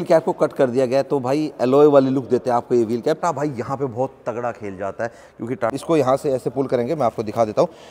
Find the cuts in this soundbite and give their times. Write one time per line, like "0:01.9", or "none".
0:03.2
0:05.7